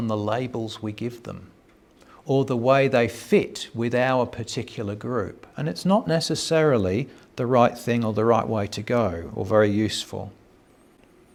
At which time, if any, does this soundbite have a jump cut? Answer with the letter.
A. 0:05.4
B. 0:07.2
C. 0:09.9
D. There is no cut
D